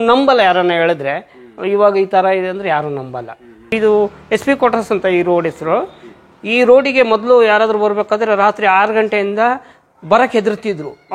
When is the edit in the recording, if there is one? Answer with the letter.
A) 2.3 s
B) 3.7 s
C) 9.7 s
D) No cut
B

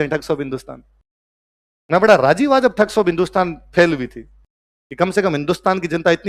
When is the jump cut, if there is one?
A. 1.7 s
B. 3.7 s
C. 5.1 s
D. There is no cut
D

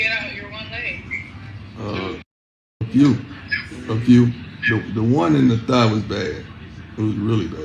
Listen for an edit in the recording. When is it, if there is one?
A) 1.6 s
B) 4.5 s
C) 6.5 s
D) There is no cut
D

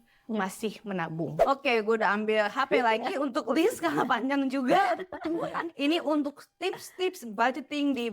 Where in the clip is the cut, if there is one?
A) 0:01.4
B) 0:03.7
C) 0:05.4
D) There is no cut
A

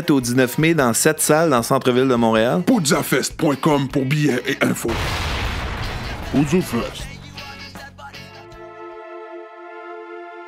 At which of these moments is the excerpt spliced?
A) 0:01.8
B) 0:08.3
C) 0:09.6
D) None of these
B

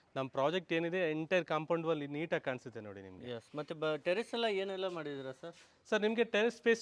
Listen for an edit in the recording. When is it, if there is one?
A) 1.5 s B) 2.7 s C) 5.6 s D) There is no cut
D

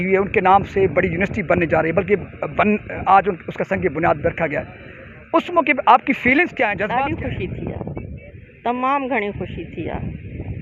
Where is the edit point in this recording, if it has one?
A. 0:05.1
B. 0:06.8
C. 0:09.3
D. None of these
B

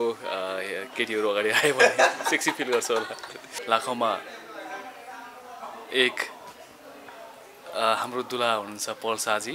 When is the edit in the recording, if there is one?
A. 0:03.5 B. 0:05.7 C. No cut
A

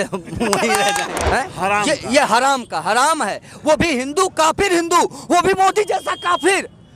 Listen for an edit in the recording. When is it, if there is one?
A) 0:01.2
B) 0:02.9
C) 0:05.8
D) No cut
A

